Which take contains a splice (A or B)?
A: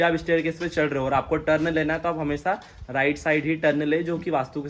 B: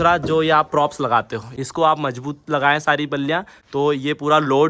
B